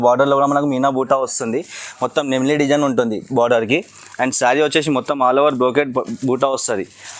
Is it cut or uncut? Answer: uncut